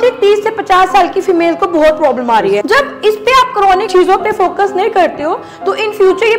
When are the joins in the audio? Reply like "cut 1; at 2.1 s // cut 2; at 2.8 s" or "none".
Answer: cut 1; at 2.6 s // cut 2; at 3.9 s